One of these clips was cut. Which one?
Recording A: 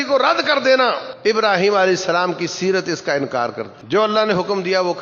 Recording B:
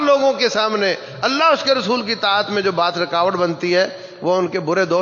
A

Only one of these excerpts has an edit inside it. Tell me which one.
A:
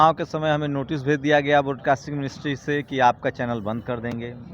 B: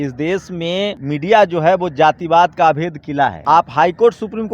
B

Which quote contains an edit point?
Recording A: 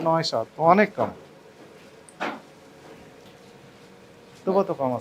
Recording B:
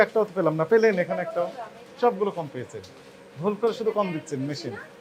A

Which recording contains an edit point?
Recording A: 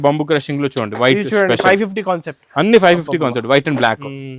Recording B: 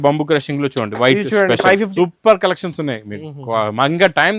B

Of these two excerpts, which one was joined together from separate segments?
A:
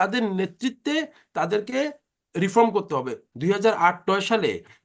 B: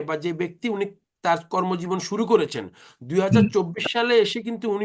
A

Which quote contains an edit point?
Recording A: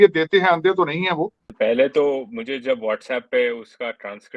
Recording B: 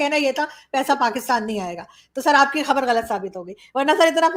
A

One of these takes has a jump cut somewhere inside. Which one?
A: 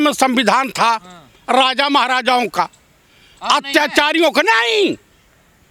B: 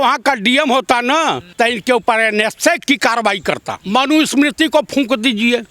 B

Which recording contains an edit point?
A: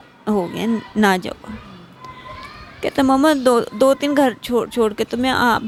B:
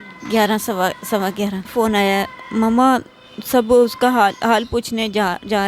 B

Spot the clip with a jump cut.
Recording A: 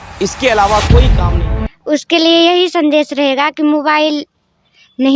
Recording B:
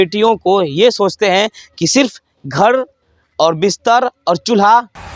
A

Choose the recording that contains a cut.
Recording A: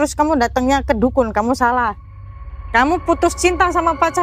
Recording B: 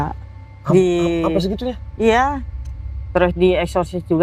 B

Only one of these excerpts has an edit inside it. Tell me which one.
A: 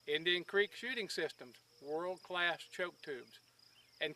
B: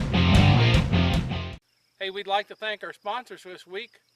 B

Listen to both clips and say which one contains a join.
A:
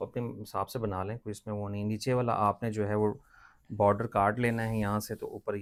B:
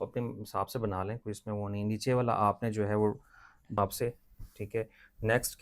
B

